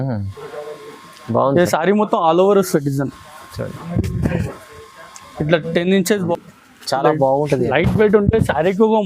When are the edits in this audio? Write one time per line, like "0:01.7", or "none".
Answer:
0:06.3